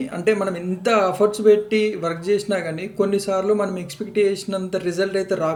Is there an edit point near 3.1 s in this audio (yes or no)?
no